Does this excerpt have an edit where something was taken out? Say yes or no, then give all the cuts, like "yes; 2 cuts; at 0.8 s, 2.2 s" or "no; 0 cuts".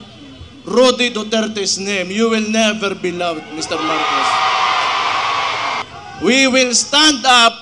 yes; 1 cut; at 5.8 s